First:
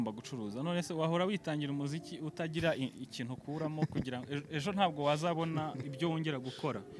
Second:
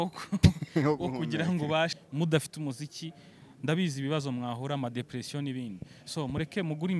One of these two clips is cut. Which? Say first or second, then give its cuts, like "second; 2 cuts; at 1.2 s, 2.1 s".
second; 1 cut; at 1.9 s